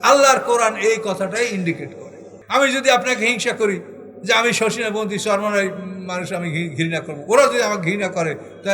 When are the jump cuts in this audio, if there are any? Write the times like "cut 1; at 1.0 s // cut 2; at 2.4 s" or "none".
cut 1; at 2.3 s

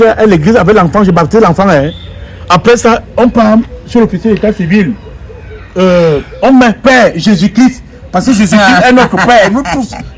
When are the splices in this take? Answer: none

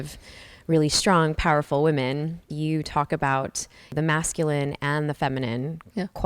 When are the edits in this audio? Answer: cut 1; at 2.5 s // cut 2; at 3.9 s

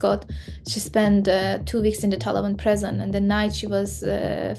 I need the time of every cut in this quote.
none

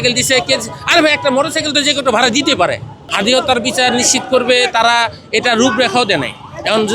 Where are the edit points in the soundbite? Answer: cut 1; at 3.0 s

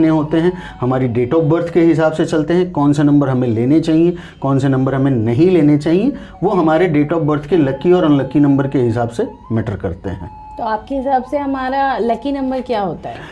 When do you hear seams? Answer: none

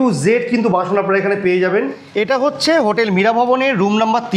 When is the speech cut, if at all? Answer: cut 1; at 2.0 s

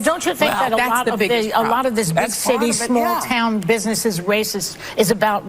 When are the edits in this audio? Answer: cut 1; at 3.7 s

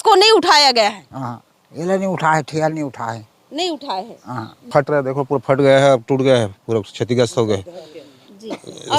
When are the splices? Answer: cut 1; at 4.6 s

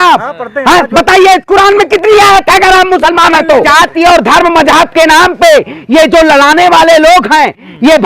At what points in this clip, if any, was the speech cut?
cut 1; at 3.6 s

